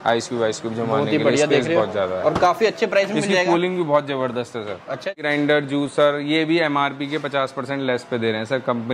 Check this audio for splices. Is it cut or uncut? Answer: cut